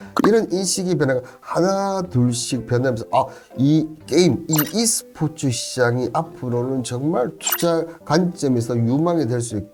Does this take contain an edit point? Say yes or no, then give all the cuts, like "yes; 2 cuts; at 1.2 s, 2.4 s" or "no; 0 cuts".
no; 0 cuts